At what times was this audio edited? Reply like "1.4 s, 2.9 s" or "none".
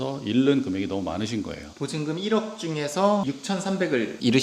1.6 s, 3.2 s